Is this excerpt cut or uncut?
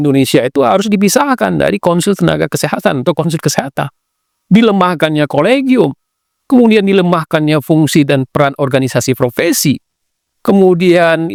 uncut